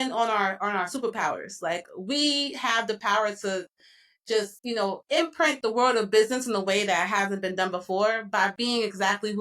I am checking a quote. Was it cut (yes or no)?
no